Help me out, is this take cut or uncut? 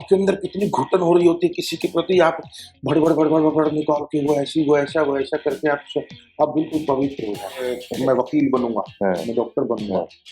cut